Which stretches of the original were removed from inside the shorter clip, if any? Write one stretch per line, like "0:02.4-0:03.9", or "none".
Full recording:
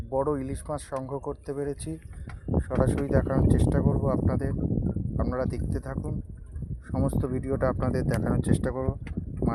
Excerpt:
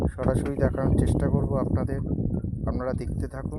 none

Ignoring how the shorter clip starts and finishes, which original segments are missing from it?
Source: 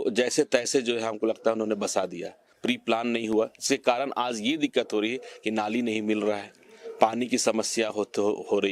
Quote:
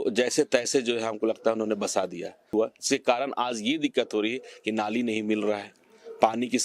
0:02.5-0:03.3

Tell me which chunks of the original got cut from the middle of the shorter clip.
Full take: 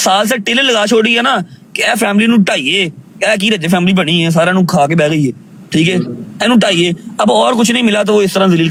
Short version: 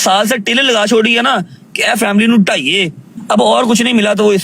0:03.1-0:07.0

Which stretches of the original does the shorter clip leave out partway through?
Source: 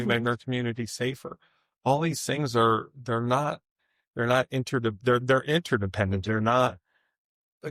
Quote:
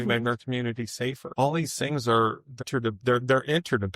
0:01.2-0:01.7
0:03.1-0:04.6

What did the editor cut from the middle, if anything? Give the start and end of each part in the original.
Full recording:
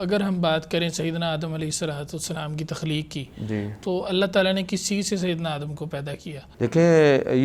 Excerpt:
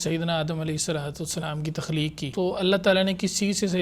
0:03.2-0:03.8

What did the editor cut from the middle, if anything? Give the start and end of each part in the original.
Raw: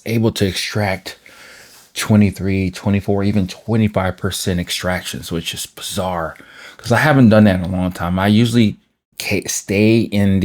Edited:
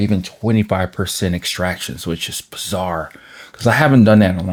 none

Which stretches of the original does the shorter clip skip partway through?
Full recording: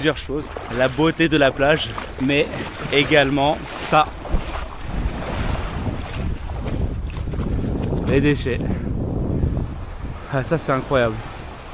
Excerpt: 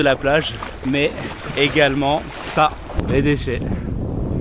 0:04.4-0:08.0

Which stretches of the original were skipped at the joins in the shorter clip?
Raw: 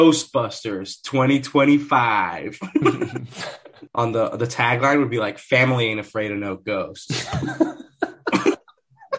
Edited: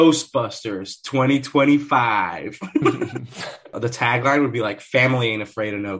0:03.8-0:04.3

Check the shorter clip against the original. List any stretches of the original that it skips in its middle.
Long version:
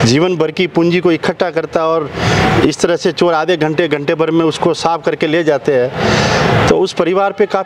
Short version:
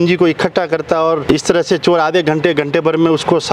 0:02.1-0:02.6

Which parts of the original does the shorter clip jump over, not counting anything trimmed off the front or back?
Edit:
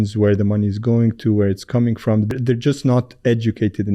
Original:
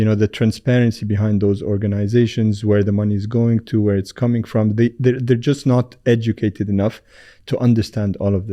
0:04.8-0:05.1

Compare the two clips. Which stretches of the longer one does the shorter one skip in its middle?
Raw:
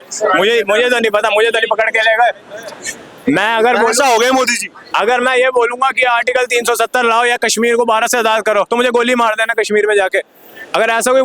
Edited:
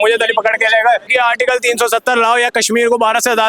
0:02.4-0:06.0

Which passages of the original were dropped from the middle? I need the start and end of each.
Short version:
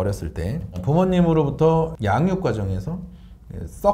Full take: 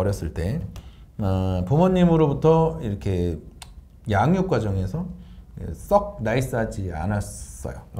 0:00.8-0:01.6
0:02.8-0:04.0

